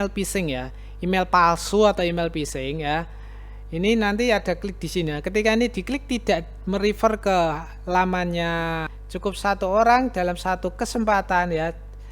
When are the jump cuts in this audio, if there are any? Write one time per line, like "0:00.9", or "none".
0:08.9